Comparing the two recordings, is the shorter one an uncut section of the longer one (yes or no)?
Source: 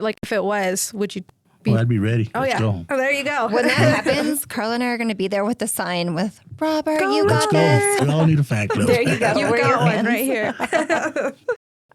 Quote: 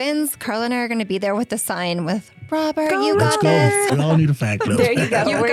yes